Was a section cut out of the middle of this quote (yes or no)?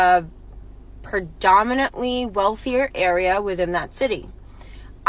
no